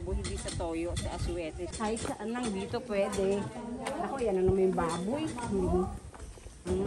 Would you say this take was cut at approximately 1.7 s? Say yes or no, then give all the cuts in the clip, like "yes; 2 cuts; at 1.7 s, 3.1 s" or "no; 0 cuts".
yes; 1 cut; at 1.7 s